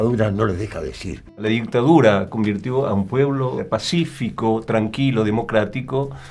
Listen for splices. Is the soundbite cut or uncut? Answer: cut